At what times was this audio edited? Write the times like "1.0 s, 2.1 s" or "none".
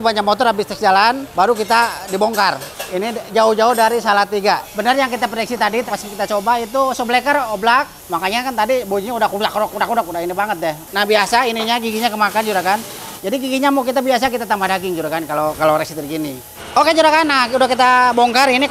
2.6 s, 4.7 s, 7.9 s, 10.8 s, 16.5 s